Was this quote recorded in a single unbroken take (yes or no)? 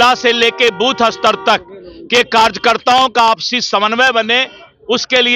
yes